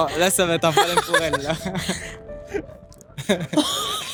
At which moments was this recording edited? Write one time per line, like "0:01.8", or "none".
none